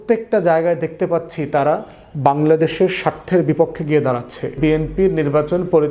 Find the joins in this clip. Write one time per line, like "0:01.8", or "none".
0:04.6